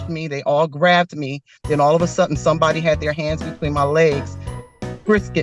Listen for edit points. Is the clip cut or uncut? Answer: uncut